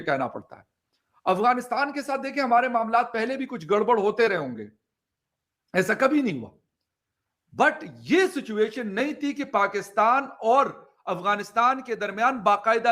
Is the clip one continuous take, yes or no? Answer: yes